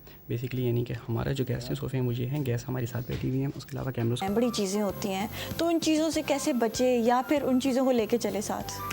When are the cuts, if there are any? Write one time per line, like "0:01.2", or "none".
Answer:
0:04.2